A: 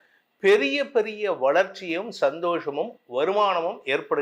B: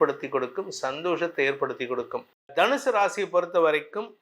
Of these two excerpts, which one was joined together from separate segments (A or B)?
B